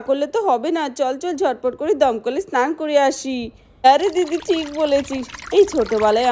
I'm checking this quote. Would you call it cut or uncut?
cut